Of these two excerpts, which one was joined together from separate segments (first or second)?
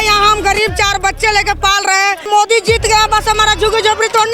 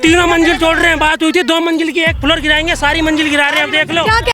first